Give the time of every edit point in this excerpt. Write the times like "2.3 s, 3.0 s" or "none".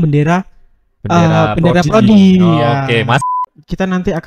3.3 s